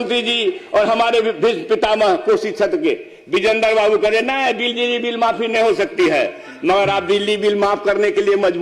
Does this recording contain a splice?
no; 0 cuts

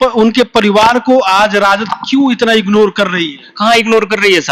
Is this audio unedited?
yes; 0 cuts

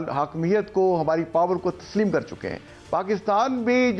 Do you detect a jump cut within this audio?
no; 0 cuts

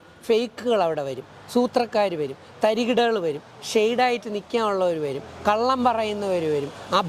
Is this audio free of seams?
yes; 0 cuts

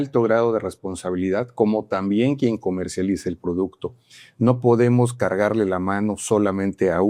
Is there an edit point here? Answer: no; 0 cuts

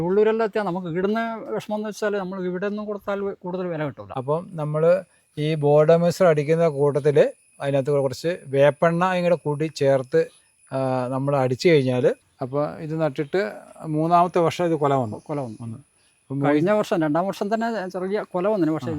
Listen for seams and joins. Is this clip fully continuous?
no; 2 cuts; at 4.1 s, 12.3 s

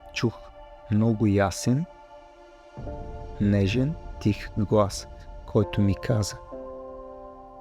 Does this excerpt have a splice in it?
no; 0 cuts

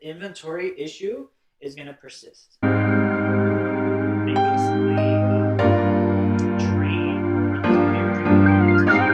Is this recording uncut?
no; 1 cut; at 2.6 s

